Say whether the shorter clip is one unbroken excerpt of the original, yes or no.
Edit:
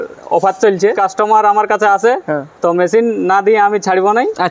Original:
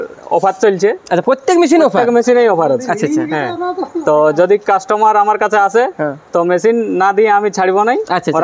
no